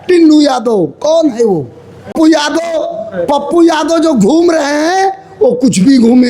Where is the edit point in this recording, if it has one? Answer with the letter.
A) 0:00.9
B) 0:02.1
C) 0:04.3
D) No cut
B